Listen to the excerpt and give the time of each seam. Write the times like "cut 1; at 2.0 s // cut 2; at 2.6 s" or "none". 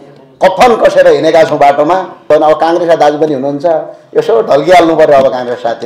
cut 1; at 2.3 s